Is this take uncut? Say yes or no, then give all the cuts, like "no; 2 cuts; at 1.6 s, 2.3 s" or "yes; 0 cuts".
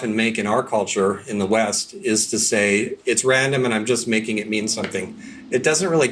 no; 1 cut; at 3.0 s